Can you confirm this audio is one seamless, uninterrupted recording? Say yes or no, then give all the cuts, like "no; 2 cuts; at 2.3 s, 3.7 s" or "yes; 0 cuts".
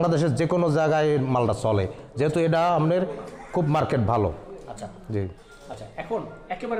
yes; 0 cuts